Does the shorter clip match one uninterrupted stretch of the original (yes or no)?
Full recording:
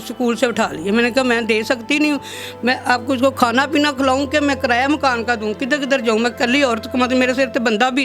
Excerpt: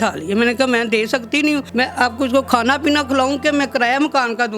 no